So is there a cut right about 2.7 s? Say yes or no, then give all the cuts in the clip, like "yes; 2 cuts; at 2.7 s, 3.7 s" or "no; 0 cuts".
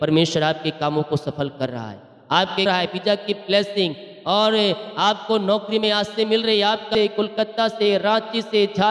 yes; 2 cuts; at 2.7 s, 6.9 s